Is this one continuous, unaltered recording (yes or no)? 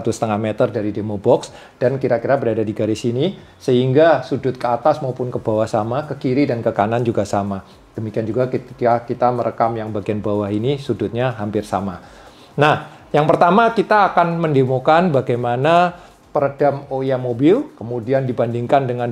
yes